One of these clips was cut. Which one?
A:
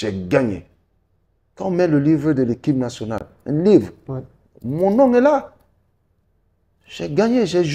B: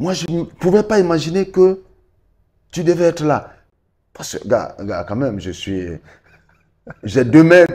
B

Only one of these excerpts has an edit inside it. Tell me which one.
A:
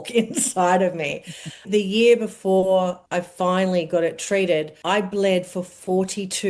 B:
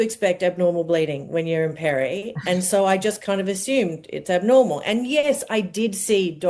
A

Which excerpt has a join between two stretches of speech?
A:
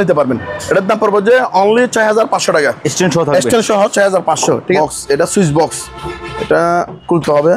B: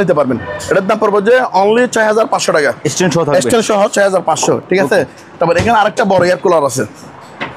A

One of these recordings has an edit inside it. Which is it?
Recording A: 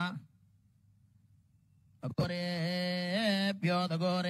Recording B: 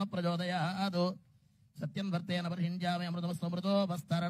B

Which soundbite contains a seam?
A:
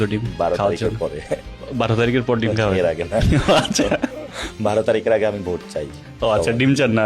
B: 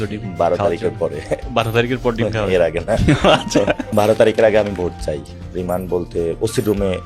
B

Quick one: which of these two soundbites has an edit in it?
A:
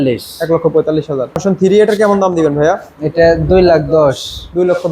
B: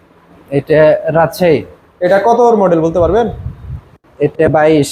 A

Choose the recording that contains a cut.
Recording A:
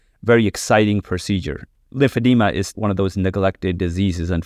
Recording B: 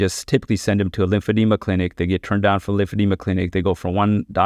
A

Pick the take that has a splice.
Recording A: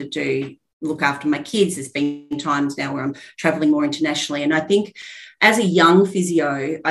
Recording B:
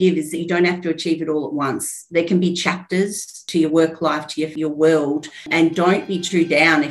B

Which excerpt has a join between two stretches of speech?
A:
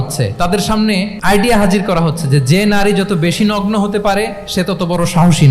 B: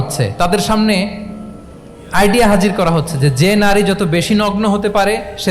A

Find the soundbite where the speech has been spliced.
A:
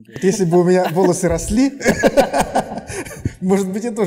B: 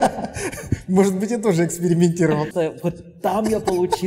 B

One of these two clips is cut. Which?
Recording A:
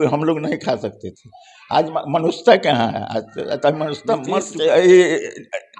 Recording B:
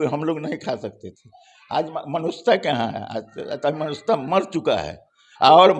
A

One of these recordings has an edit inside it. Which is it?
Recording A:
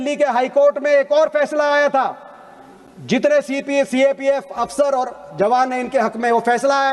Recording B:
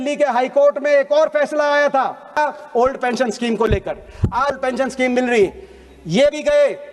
B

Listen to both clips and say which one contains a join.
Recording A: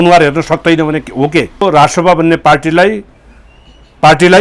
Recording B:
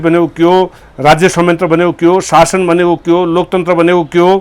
A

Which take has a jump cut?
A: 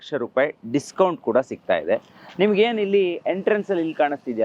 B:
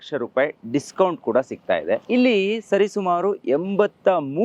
B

